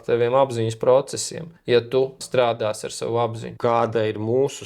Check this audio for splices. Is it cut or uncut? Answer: cut